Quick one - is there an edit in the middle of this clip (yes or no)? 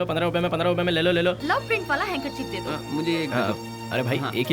yes